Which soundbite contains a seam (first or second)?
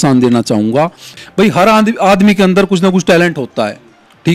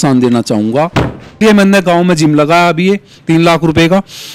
second